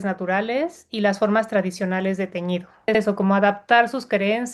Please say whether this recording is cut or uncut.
cut